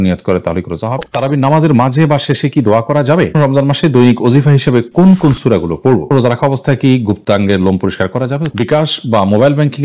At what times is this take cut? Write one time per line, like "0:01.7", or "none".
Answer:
0:01.0
0:03.4
0:06.1
0:08.5